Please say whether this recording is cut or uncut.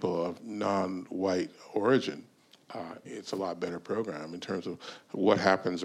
uncut